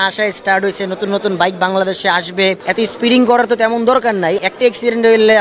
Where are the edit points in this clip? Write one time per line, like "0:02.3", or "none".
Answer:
0:02.6
0:04.4